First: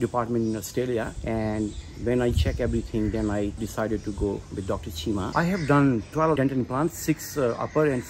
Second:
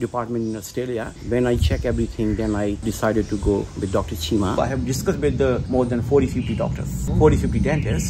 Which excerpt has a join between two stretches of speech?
second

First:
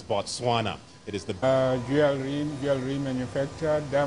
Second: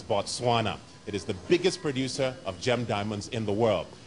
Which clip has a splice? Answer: second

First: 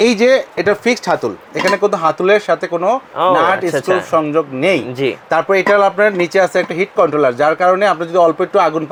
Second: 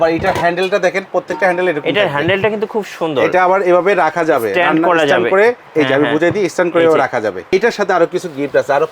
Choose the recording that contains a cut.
second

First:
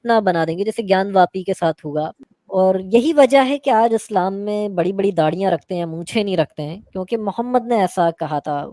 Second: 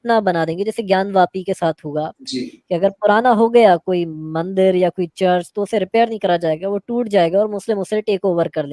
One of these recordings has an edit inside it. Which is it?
first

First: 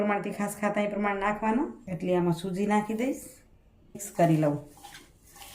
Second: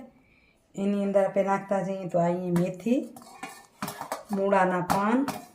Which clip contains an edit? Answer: first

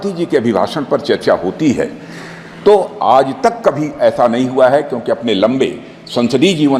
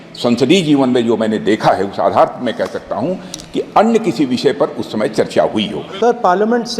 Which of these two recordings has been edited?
second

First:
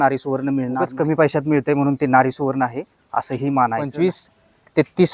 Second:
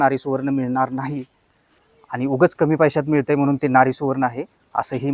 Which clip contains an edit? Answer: first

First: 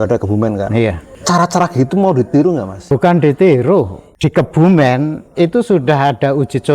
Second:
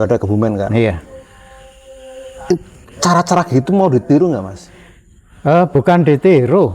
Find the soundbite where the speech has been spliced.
first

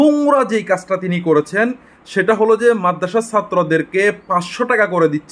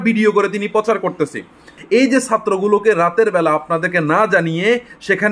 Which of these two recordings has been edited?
second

